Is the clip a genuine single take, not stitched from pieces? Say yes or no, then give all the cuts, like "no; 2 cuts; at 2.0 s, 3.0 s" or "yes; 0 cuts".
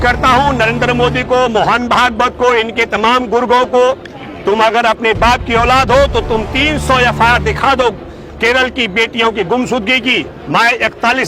yes; 0 cuts